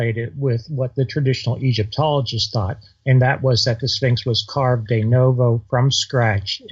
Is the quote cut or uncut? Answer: uncut